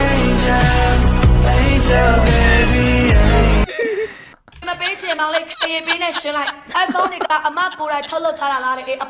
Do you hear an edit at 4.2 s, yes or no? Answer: yes